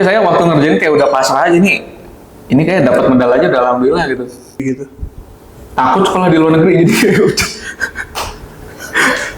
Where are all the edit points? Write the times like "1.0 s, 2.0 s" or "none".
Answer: 4.6 s

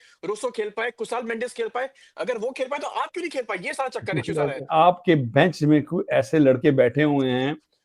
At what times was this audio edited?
4.6 s

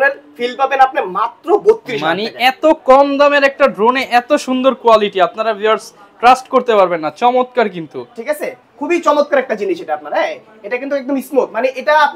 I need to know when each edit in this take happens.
none

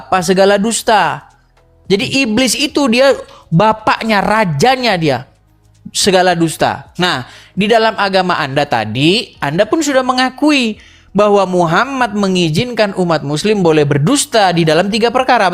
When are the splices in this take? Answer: none

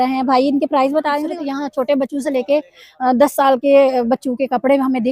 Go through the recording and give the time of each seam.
1.3 s

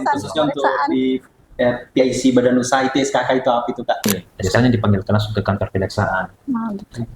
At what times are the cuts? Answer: 4.1 s

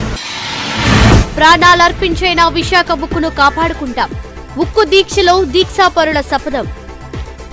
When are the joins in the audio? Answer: 1.2 s

